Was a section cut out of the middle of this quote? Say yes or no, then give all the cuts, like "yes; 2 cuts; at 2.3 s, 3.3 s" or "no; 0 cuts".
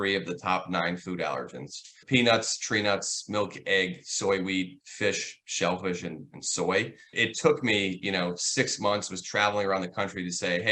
yes; 2 cuts; at 2.0 s, 7.1 s